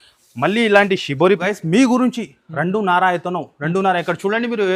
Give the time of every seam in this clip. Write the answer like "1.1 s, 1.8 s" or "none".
1.4 s